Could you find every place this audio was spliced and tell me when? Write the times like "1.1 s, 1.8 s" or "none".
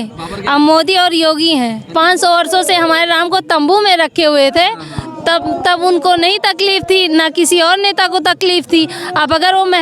1.9 s

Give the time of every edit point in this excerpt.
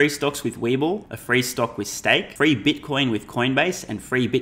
1.1 s, 2.3 s

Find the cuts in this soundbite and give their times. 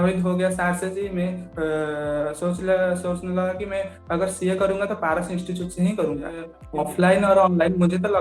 6.6 s

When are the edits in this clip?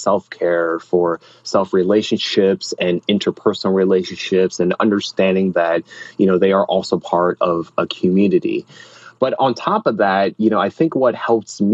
none

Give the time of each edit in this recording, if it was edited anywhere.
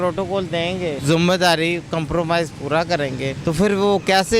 1.0 s, 3.4 s

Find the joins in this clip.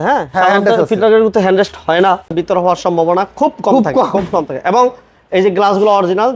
2.3 s

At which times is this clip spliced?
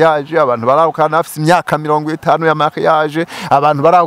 none

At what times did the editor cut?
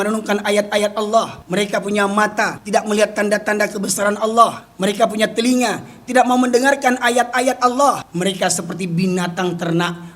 1.4 s, 2.6 s, 4.6 s, 8.1 s

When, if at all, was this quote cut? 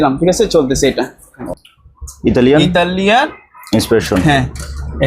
1.4 s

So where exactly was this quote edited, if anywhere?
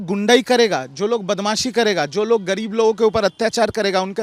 none

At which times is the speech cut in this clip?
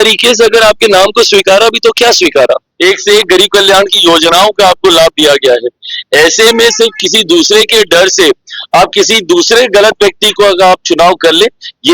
2.7 s

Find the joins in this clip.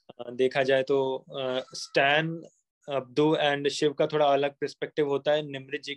none

